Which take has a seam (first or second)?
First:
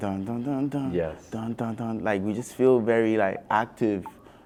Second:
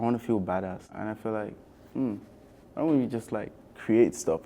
second